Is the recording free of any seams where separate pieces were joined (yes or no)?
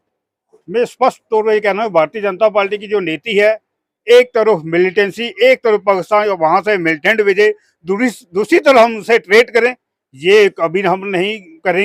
yes